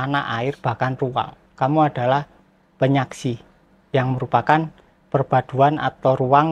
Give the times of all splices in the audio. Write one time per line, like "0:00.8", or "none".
none